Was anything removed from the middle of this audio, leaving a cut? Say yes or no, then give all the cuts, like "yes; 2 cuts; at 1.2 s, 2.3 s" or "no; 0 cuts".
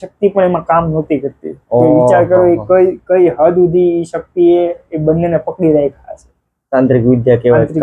no; 0 cuts